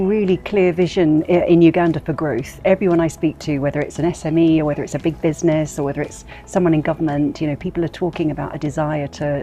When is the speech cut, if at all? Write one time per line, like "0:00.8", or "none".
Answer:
none